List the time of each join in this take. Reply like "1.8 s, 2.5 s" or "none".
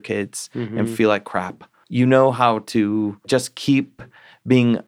1.7 s, 3.2 s